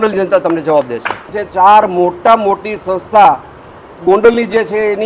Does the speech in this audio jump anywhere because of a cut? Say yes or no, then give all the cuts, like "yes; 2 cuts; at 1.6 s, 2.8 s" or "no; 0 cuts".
yes; 1 cut; at 1.3 s